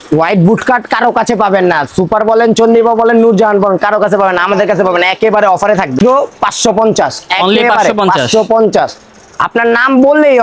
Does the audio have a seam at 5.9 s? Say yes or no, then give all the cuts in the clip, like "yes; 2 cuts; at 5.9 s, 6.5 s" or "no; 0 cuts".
yes; 1 cut; at 5.9 s